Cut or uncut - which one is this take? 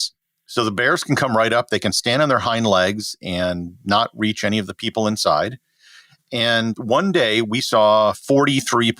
uncut